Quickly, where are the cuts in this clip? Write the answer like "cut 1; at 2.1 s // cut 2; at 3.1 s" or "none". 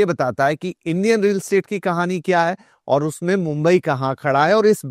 none